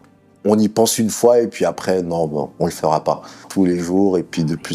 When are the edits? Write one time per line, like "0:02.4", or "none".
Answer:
0:03.5

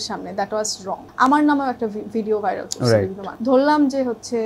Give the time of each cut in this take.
0:01.0
0:03.3

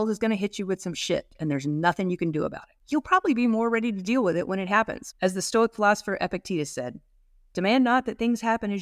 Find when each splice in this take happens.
0:02.7
0:05.0

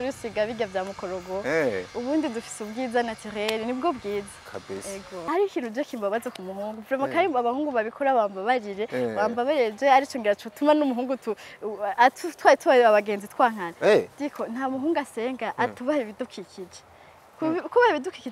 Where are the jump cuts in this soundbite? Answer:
0:05.1

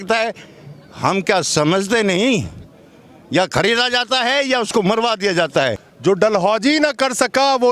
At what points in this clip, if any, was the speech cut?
0:05.8

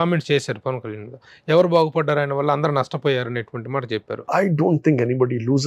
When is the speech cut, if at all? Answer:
0:04.2

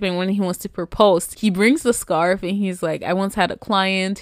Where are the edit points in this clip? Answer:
0:01.3

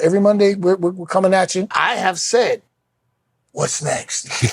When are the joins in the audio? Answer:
0:01.7

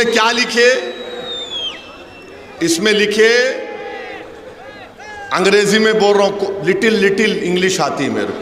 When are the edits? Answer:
none

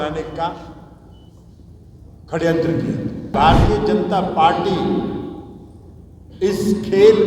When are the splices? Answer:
0:03.3

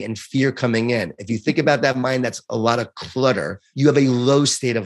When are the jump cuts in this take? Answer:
0:03.6

